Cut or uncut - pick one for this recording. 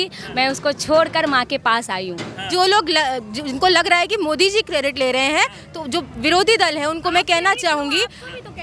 cut